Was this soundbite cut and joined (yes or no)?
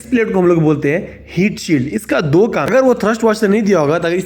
yes